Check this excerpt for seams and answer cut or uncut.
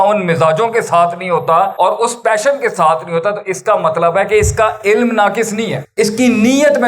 cut